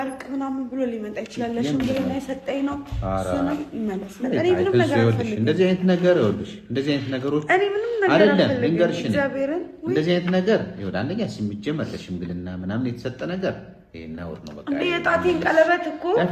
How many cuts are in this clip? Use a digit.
0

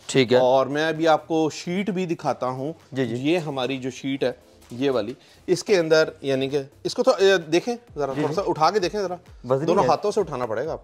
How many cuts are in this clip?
0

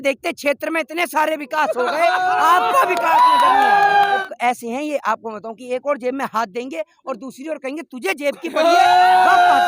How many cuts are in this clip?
1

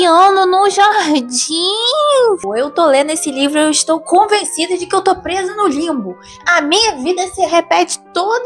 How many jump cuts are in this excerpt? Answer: 1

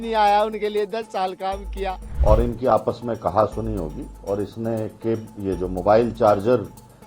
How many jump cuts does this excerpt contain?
1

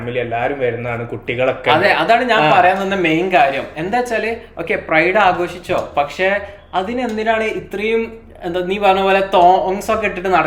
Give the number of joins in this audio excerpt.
0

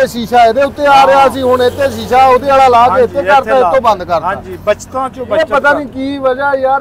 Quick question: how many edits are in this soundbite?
0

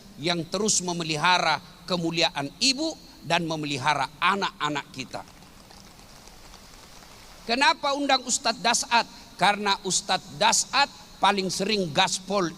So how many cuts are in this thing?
1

